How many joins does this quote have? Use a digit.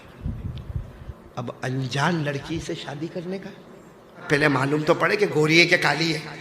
1